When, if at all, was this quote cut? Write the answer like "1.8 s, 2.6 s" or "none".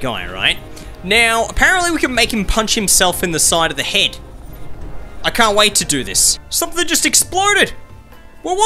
6.2 s